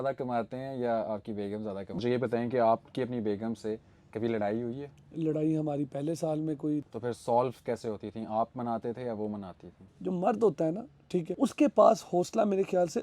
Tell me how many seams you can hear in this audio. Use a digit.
3